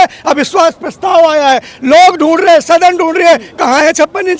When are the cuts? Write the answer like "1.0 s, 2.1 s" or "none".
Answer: none